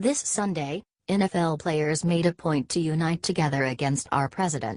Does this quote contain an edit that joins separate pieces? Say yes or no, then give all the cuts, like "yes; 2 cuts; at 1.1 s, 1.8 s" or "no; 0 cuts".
no; 0 cuts